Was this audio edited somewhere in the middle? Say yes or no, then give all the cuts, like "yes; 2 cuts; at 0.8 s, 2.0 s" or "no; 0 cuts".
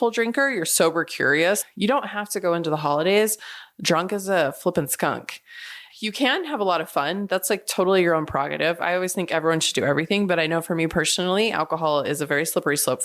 yes; 1 cut; at 1.7 s